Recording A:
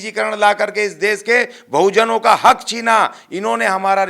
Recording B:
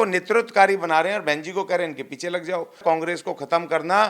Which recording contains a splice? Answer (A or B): B